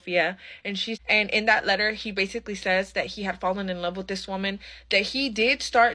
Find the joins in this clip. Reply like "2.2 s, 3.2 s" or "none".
0.9 s